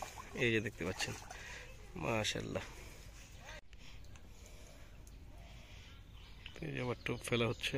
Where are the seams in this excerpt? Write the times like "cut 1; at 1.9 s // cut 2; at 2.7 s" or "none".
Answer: cut 1; at 3.6 s